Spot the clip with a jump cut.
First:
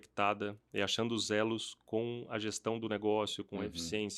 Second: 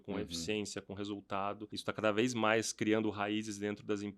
second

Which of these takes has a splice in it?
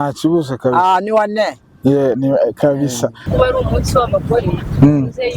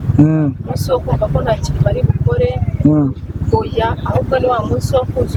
first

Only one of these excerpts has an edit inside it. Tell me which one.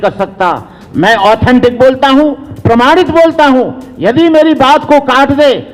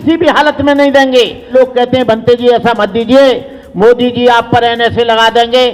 second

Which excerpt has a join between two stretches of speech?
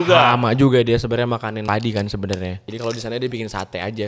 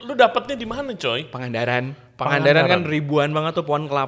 first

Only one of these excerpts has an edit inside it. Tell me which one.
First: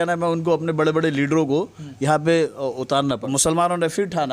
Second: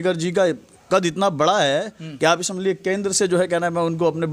first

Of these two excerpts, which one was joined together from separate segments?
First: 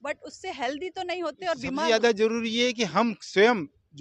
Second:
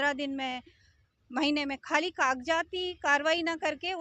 first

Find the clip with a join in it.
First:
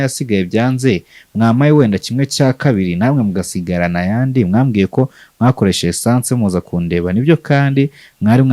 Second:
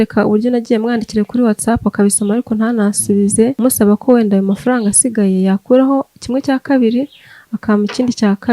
second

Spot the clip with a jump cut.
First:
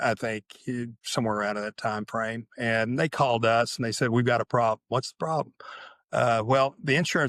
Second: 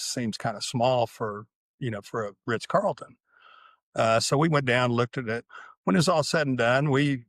second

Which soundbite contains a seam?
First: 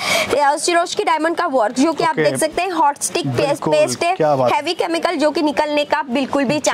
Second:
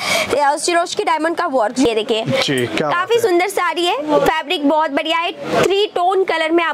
second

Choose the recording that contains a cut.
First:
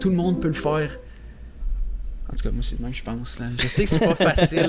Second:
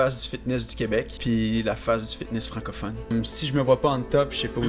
second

